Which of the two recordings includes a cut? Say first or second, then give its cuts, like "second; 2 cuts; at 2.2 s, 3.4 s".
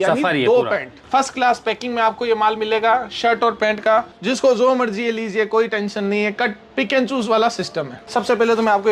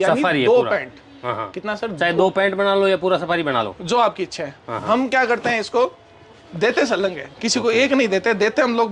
first; 3 cuts; at 0.9 s, 4.2 s, 7.9 s